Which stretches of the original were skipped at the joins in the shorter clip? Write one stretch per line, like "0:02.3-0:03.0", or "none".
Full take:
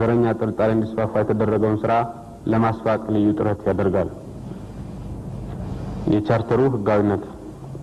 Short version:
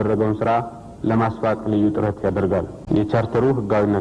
0:04.2-0:05.9